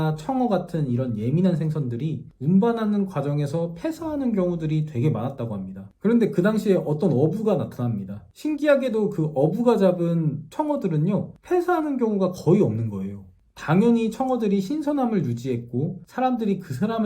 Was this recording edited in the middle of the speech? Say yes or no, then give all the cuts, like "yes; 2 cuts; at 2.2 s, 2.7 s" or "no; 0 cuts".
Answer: yes; 1 cut; at 5.8 s